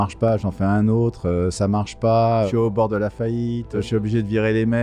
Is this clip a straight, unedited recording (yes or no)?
no